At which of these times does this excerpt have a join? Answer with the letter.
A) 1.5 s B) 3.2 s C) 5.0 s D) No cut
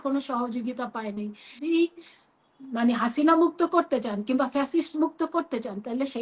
A